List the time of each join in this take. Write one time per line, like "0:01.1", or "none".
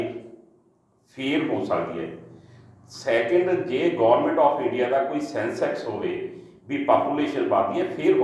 none